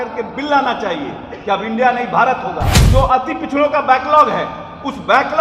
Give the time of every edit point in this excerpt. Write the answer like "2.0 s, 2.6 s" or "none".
2.7 s

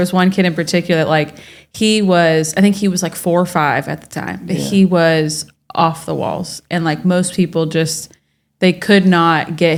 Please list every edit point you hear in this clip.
none

